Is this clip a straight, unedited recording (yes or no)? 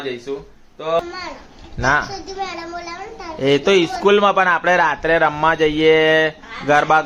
no